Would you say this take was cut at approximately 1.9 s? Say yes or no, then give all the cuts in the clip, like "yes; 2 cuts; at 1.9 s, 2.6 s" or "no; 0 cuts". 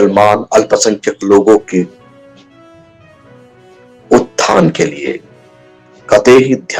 yes; 2 cuts; at 1.9 s, 3.5 s